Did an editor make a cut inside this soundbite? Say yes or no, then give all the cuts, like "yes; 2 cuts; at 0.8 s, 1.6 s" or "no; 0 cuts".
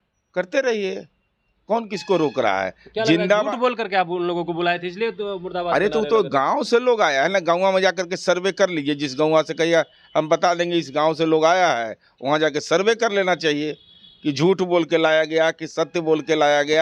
no; 0 cuts